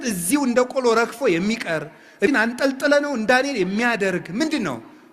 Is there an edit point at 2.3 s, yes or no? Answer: yes